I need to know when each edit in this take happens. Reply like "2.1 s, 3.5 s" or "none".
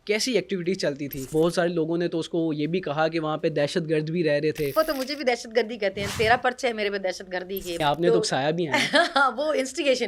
1.3 s, 4.7 s, 7.8 s